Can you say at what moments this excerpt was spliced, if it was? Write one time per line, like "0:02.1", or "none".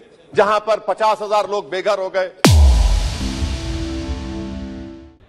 none